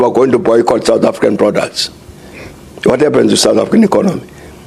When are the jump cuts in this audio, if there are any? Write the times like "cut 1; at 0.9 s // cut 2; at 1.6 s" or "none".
none